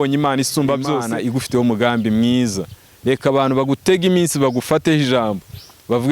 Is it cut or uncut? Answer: cut